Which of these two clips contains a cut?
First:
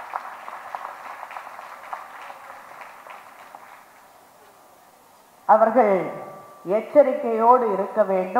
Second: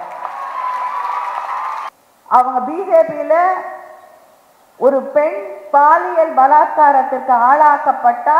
second; 1 cut; at 1.9 s

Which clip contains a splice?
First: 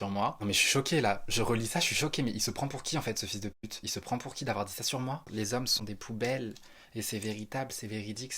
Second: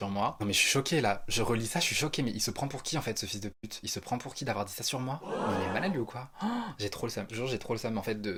first; 1 cut; at 5.2 s

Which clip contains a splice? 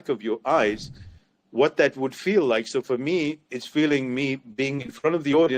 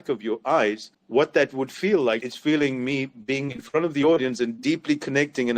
second; 2 cuts; at 0.9 s, 2.2 s

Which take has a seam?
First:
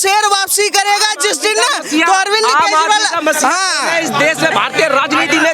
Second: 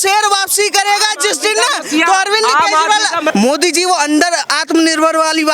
second; 1 cut; at 3.3 s

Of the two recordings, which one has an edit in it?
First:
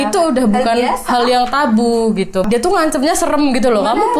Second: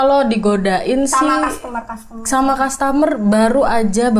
first; 1 cut; at 2.4 s

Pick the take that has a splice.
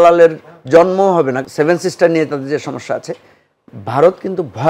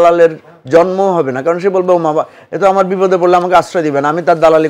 first; 1 cut; at 1.4 s

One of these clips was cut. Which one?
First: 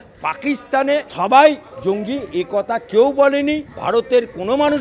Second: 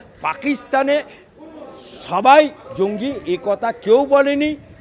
first; 2 cuts; at 1.1 s, 3.7 s

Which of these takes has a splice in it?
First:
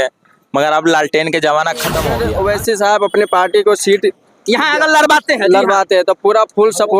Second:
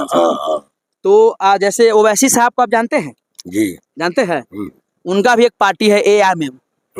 first; 1 cut; at 2.1 s

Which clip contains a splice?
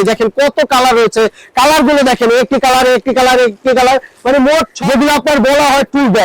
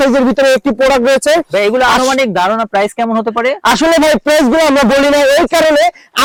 first; 1 cut; at 4.7 s

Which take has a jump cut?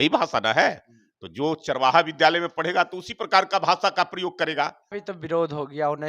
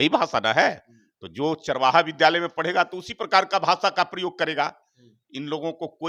first; 1 cut; at 5.0 s

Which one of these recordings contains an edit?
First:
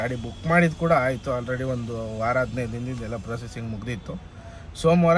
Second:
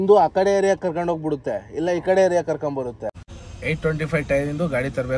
second; 1 cut; at 3.1 s

